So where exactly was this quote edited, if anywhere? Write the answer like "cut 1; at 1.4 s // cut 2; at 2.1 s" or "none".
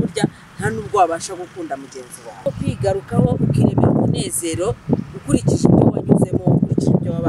cut 1; at 2.4 s